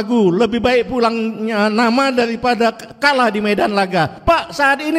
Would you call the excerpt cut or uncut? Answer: cut